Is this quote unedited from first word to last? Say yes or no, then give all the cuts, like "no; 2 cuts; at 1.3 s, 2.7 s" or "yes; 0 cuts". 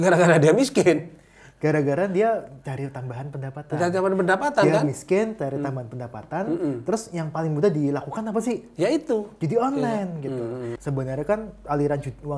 no; 1 cut; at 10.7 s